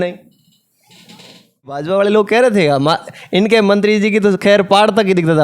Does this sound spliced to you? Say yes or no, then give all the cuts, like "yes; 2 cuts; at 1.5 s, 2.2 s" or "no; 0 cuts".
yes; 1 cut; at 1.9 s